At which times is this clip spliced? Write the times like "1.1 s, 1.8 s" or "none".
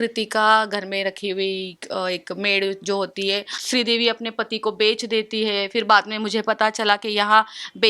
3.5 s